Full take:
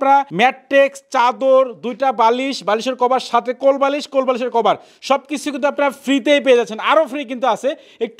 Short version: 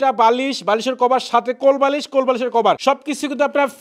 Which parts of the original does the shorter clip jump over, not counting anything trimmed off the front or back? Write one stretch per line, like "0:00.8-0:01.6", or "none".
0:04.8-0:05.0